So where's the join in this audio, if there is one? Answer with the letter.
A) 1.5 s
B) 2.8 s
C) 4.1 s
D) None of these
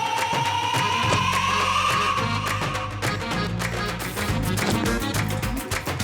C